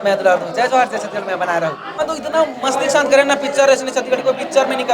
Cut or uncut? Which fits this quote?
cut